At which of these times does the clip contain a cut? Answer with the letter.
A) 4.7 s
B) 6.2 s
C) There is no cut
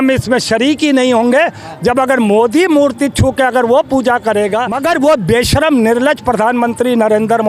A